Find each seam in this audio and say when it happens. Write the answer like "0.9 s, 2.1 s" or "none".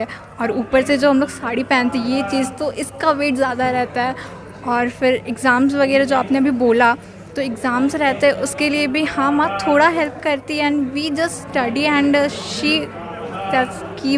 none